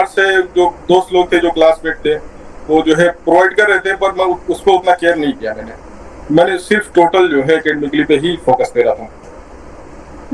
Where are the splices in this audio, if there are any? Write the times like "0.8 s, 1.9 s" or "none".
none